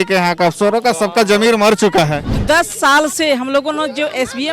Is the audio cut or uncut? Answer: cut